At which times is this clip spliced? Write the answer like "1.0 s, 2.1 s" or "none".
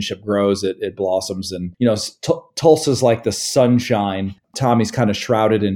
4.5 s

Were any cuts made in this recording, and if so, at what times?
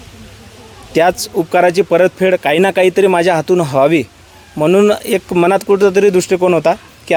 none

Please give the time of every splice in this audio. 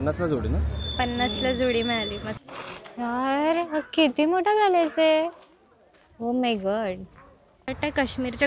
2.4 s, 7.7 s

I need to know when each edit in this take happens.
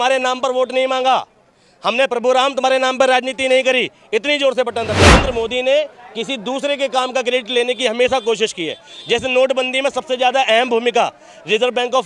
5.1 s

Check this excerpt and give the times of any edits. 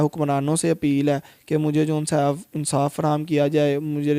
none

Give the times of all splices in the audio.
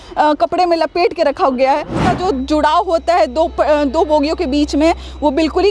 2.0 s

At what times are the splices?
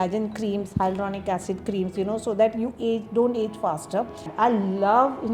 4.2 s

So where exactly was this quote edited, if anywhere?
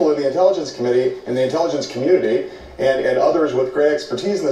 none

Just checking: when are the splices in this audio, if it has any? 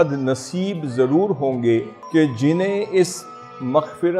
2.0 s

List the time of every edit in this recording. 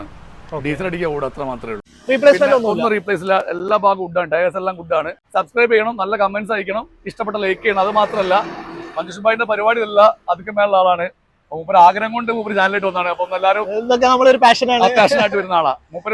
1.9 s, 5.2 s

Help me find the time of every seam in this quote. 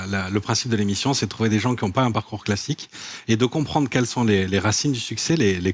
none

